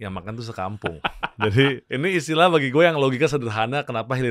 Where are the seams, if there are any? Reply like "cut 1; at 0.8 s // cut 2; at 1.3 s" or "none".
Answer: cut 1; at 1.8 s